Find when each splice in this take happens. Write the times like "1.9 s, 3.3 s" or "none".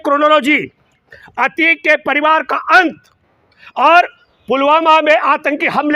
none